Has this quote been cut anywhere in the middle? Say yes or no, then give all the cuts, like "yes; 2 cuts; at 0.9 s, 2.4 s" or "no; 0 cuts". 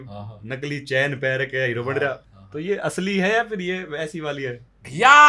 yes; 1 cut; at 2.2 s